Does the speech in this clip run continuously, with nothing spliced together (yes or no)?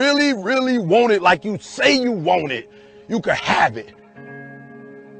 yes